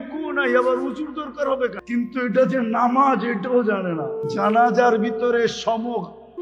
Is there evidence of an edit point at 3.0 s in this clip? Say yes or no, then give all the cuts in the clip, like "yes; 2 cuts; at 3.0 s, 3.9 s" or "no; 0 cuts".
no; 2 cuts; at 1.8 s, 4.2 s